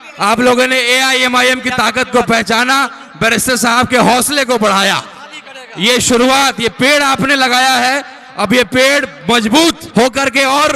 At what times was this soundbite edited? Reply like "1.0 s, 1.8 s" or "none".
9.8 s